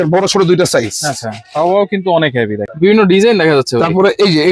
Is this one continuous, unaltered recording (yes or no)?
no